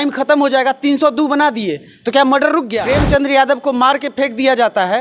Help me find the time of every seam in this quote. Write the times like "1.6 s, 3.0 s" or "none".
2.8 s